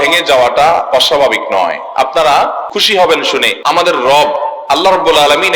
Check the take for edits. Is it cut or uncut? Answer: cut